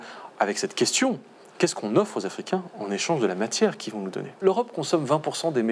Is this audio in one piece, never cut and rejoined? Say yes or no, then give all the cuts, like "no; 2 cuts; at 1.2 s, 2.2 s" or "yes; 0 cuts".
no; 1 cut; at 4.4 s